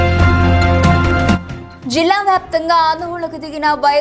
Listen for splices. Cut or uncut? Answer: cut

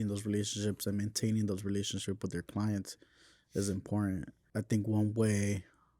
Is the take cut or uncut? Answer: cut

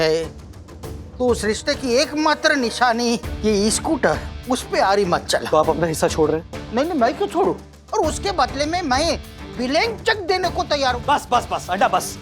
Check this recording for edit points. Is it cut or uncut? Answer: cut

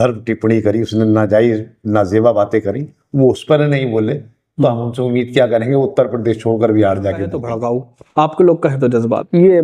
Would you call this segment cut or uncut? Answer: cut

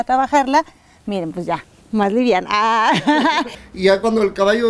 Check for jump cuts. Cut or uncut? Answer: cut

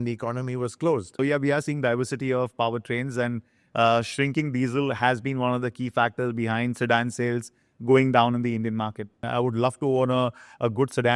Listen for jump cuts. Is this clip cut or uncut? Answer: cut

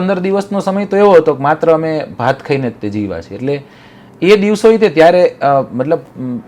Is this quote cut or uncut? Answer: uncut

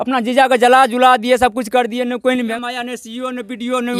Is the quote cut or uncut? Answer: cut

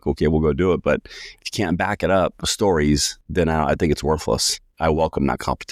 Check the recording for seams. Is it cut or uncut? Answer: cut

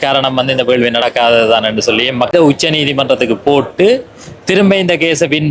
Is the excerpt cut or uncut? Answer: cut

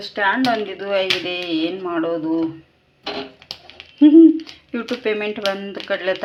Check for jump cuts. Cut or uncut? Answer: uncut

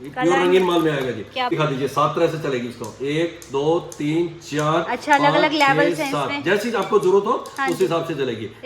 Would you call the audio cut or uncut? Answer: cut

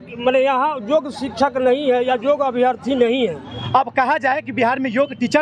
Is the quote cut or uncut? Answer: cut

